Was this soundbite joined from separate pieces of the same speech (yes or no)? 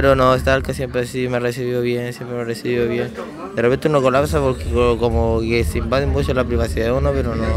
no